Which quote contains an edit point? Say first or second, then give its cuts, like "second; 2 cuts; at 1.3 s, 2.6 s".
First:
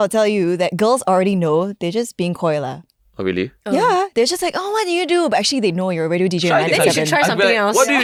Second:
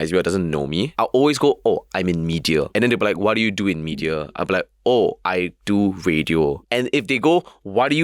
second; 4 cuts; at 0.9 s, 2.7 s, 5.2 s, 6.6 s